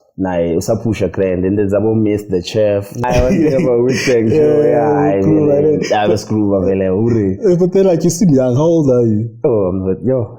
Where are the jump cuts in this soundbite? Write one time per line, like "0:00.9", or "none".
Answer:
0:03.0